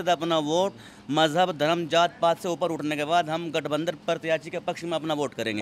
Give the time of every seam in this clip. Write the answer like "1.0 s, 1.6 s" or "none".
none